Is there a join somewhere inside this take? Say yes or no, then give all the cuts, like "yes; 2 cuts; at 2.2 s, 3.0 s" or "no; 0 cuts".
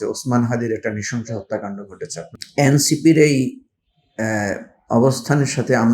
yes; 1 cut; at 2.3 s